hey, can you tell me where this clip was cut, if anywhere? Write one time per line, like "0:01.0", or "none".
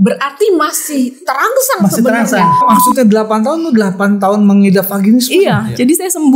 0:02.6